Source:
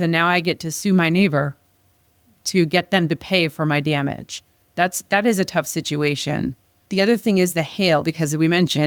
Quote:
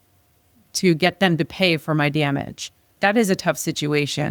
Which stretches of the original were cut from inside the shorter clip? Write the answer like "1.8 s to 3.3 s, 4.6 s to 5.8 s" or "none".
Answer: 4.6 s to 5.0 s